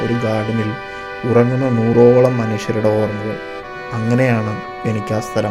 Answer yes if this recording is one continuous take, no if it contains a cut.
yes